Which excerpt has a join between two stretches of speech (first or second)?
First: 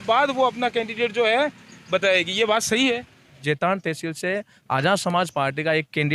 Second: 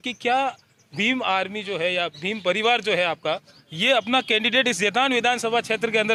first